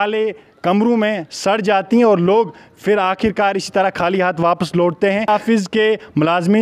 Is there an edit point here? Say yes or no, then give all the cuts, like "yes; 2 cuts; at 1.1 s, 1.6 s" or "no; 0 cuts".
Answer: yes; 1 cut; at 5.3 s